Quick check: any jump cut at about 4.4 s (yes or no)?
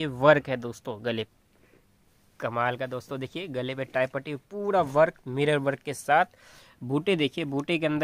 no